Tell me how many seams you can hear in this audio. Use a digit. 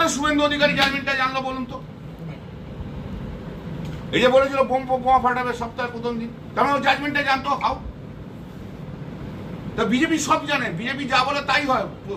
0